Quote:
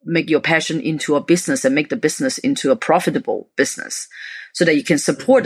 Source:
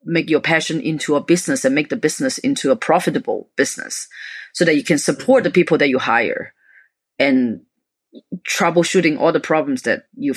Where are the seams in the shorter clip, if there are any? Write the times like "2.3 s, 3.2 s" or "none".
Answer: none